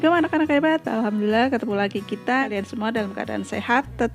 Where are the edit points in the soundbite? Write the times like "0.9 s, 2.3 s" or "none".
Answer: 2.4 s

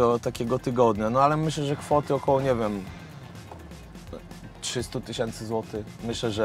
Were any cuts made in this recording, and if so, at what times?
none

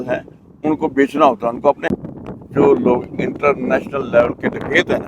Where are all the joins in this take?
1.8 s

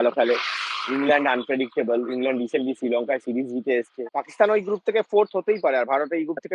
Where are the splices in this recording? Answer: 4.1 s

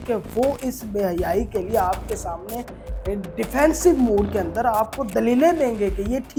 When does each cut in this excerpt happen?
none

